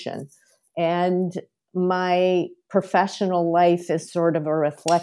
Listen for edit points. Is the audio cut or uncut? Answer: uncut